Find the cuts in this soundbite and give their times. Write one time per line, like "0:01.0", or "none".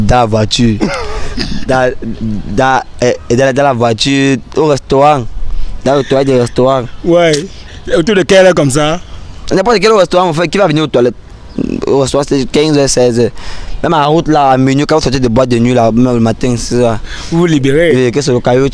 none